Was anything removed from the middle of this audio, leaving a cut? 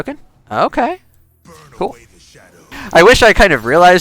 yes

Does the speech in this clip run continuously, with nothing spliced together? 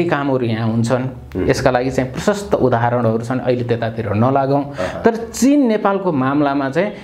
yes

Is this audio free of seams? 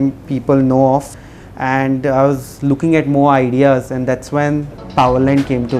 no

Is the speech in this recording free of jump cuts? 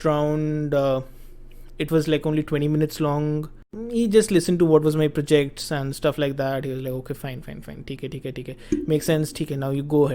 no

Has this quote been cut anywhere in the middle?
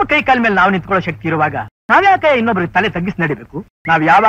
no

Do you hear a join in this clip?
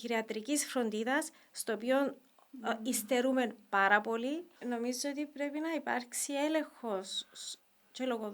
yes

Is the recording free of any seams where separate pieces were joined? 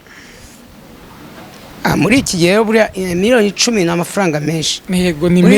yes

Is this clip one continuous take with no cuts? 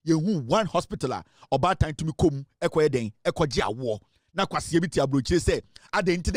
yes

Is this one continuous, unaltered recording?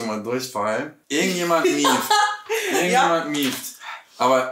no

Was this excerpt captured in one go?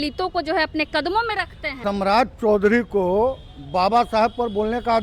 no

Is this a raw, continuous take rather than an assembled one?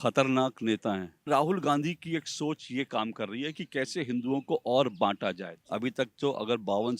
no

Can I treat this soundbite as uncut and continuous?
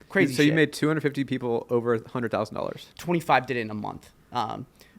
no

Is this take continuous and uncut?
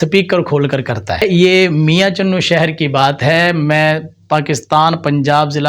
no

